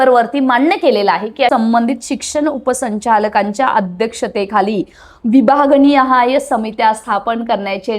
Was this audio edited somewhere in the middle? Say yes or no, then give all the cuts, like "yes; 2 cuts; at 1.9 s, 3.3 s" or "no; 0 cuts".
yes; 1 cut; at 1.5 s